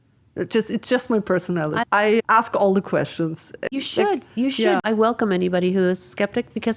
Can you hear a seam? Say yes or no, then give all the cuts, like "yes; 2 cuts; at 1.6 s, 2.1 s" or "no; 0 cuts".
yes; 3 cuts; at 1.8 s, 3.7 s, 4.8 s